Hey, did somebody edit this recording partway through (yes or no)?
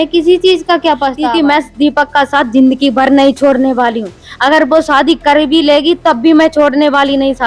yes